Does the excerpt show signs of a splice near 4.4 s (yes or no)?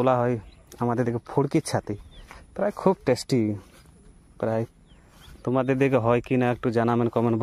no